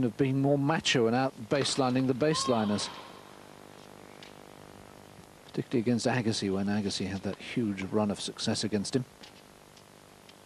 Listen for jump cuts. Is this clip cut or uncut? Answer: cut